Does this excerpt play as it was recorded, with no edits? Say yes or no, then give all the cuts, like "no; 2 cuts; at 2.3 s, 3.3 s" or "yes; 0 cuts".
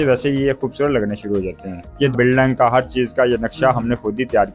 no; 1 cut; at 2.1 s